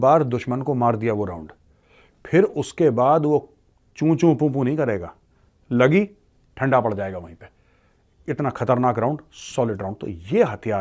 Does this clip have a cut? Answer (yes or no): no